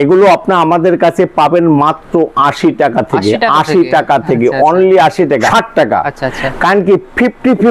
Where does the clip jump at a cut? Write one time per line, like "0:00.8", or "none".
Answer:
0:05.5